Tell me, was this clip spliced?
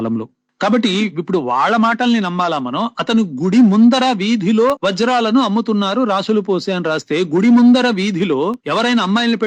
no; 0 cuts

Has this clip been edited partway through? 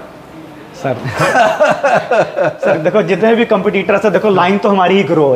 no; 0 cuts

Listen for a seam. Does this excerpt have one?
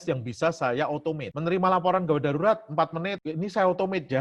no; 0 cuts

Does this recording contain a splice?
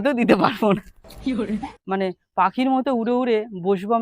yes; 1 cut; at 1.4 s

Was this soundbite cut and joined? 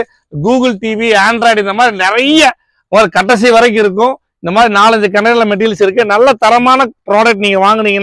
no; 0 cuts

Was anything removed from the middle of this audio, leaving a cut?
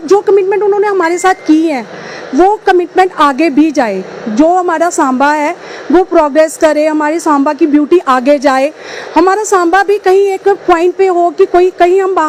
no; 0 cuts

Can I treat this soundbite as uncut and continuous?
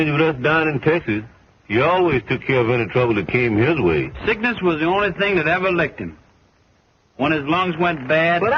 yes; 0 cuts

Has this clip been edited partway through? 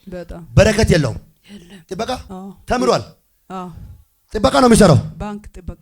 yes; 1 cut; at 2.3 s

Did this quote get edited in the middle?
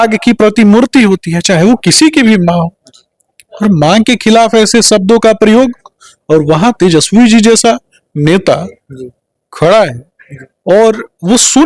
no; 0 cuts

